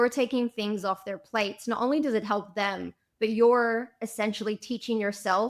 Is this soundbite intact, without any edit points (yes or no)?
yes